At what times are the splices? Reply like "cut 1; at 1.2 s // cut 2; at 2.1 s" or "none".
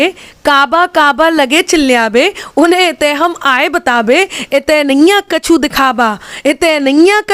none